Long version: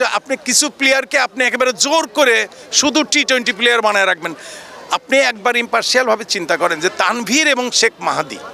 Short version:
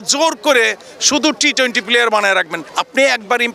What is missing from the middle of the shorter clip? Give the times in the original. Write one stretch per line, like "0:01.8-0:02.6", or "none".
0:04.3-0:04.7